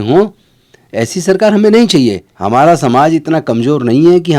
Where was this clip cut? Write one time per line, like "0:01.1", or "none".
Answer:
0:02.3

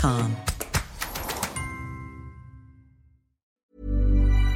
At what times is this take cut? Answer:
0:03.5

